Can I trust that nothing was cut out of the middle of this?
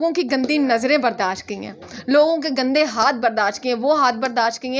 yes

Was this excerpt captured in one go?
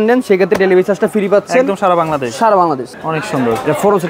no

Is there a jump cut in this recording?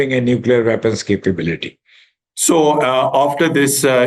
no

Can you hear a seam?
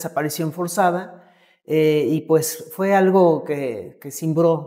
no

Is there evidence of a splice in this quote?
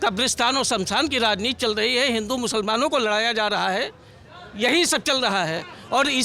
no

